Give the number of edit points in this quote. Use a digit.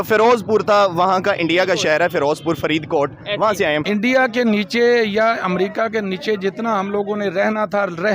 1